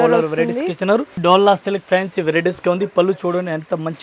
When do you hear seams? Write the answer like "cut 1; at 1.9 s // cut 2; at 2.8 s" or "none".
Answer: cut 1; at 1.2 s